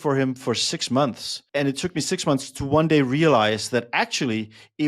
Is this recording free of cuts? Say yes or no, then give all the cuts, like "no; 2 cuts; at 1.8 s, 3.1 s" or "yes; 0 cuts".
no; 1 cut; at 1.3 s